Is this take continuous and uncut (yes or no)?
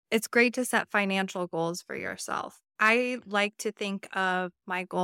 no